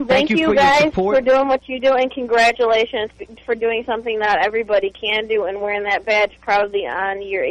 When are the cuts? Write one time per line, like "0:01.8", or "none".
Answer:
0:02.3

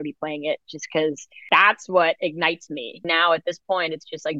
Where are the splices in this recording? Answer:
0:01.3
0:03.0

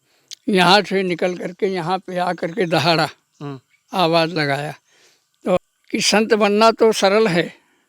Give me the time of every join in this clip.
0:05.6

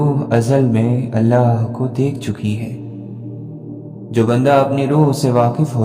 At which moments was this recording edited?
0:02.7
0:04.1

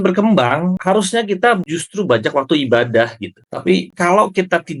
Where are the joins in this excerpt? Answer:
0:00.8
0:01.6
0:03.8

